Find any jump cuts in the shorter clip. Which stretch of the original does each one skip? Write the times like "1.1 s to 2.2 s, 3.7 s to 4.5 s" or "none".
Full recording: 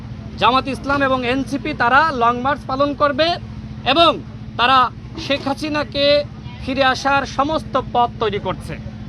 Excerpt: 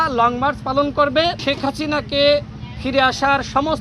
3.4 s to 5.2 s